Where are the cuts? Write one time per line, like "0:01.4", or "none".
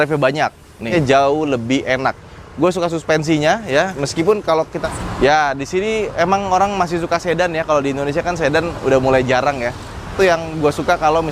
0:00.8
0:04.8
0:10.1